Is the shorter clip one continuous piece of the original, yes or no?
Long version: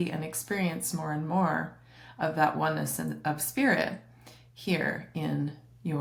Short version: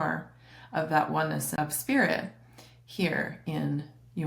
no